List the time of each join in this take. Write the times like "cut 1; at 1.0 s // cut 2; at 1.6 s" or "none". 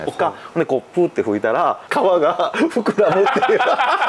cut 1; at 1.8 s